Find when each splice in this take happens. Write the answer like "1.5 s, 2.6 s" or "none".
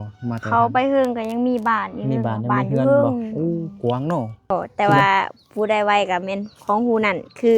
4.5 s